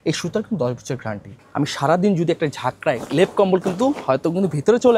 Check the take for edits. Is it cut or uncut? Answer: cut